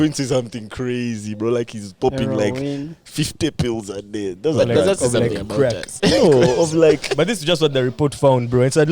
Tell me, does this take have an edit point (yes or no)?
yes